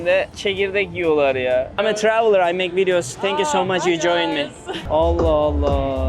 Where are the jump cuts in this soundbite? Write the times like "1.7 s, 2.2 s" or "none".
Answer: 1.7 s, 4.8 s